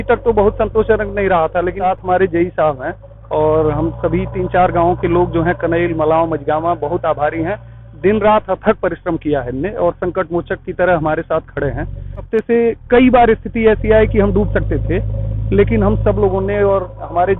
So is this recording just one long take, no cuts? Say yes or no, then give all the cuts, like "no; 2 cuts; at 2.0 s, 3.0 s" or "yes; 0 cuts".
no; 2 cuts; at 1.8 s, 12.3 s